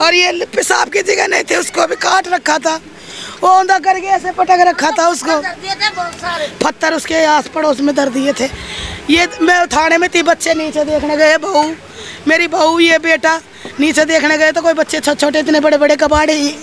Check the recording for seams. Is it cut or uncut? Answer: uncut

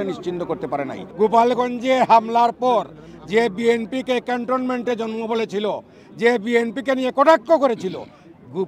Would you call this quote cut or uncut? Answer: cut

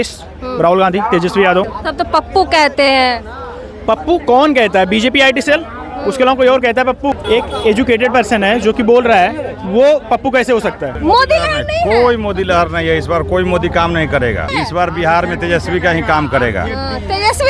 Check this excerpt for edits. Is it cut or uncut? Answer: cut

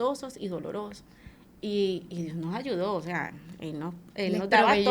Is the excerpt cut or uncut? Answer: uncut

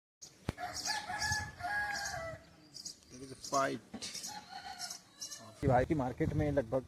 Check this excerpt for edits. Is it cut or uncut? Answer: cut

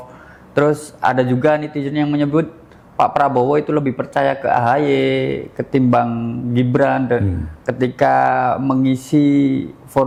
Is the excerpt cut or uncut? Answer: uncut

